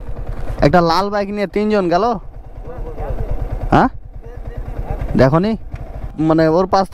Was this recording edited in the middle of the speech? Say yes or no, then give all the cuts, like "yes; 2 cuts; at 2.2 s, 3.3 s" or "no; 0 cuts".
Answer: yes; 1 cut; at 6.0 s